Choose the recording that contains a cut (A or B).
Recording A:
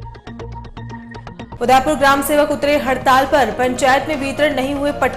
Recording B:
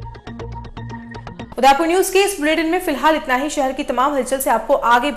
A